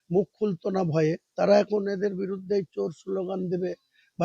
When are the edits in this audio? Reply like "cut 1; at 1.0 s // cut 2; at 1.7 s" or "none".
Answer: none

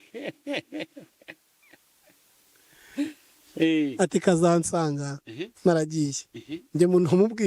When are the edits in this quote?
none

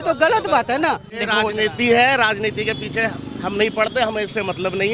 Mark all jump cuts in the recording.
cut 1; at 1.3 s

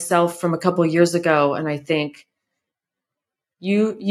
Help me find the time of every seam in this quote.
none

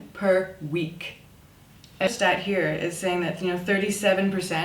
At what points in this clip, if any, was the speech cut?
cut 1; at 2.1 s

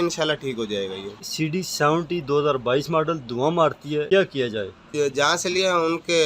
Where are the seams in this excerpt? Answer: cut 1; at 1.2 s // cut 2; at 4.1 s // cut 3; at 4.8 s

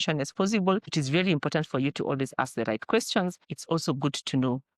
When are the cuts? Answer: cut 1; at 0.9 s // cut 2; at 3.5 s

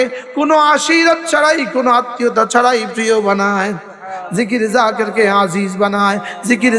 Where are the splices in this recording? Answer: none

